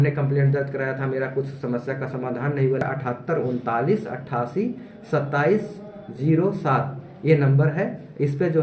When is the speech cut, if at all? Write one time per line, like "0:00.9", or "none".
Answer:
0:02.8